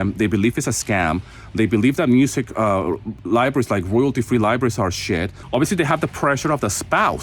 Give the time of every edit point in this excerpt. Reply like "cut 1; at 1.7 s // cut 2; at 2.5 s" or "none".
cut 1; at 5.4 s